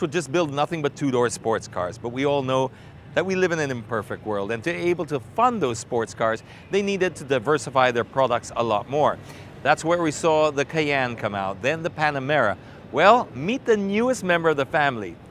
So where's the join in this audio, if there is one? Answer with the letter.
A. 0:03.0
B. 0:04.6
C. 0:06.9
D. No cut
B